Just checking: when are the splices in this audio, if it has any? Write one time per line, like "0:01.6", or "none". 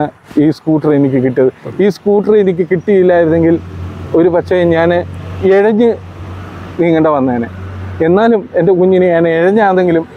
none